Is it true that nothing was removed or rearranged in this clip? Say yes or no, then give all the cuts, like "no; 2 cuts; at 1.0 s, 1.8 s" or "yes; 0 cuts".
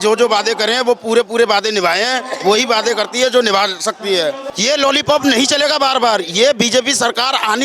no; 1 cut; at 4.4 s